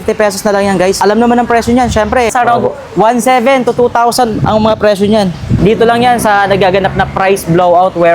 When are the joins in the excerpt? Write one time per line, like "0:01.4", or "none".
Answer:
0:01.0
0:02.3
0:05.5